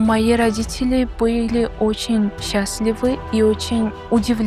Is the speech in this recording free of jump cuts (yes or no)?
yes